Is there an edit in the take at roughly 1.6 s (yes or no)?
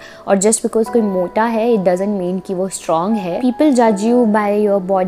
no